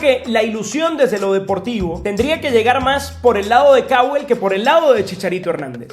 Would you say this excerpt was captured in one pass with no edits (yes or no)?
no